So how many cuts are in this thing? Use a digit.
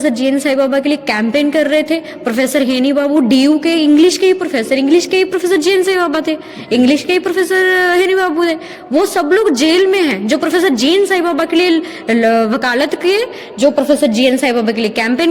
0